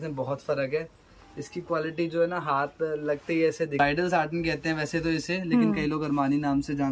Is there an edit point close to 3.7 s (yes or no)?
yes